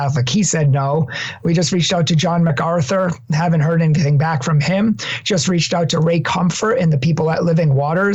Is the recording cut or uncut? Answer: uncut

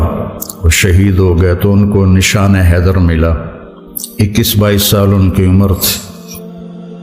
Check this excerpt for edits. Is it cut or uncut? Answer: cut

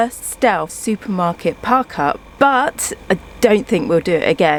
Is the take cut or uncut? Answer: uncut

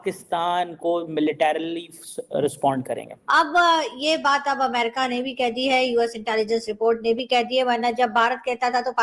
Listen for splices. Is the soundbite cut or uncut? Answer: cut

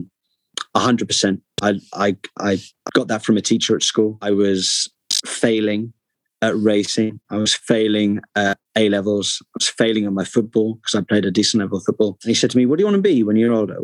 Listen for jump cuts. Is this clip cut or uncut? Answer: cut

